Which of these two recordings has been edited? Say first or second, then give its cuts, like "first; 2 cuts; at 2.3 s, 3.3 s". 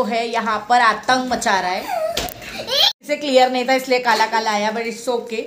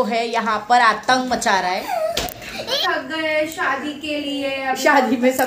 second; 1 cut; at 2.8 s